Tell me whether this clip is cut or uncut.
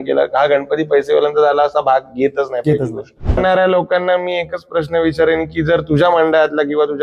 cut